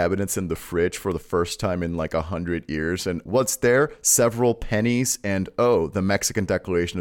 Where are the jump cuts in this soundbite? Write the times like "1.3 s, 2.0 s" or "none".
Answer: 3.2 s